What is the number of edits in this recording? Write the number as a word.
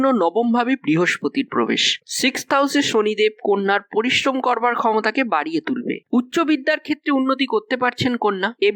two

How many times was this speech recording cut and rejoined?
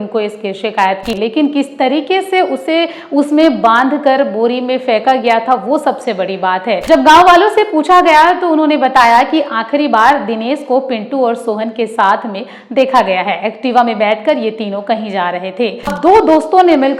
three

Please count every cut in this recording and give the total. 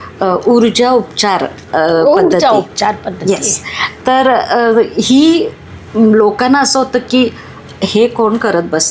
zero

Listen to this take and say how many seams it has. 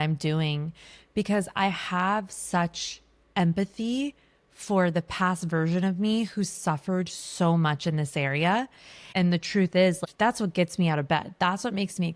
two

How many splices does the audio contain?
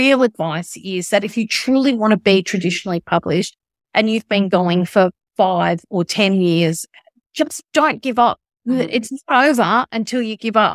zero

